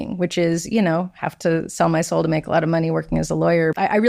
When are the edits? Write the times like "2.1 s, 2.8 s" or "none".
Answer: none

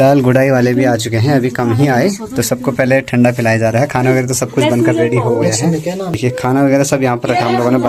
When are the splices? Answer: none

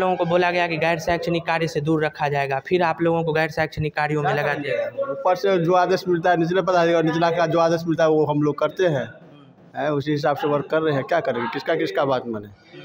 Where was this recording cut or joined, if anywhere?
none

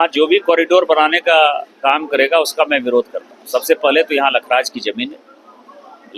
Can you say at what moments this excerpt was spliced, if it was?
none

